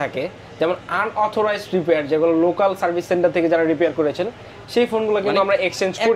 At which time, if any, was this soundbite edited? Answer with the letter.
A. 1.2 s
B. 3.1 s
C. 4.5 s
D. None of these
D